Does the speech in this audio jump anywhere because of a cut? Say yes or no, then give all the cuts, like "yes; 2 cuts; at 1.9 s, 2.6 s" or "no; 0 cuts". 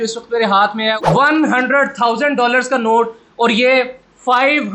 no; 0 cuts